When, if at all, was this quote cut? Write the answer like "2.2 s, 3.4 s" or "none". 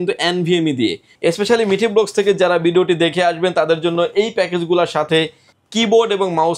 1.0 s

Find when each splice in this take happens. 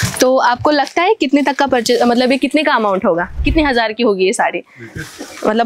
3.3 s

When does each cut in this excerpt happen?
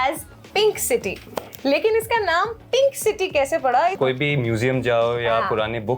4.0 s

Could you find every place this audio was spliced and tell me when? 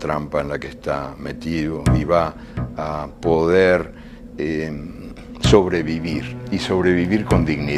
4.2 s

